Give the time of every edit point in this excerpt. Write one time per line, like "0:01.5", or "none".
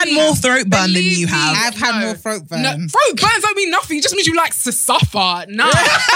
none